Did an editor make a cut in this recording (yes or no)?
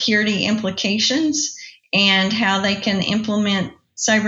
no